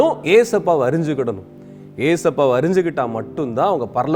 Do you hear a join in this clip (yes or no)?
no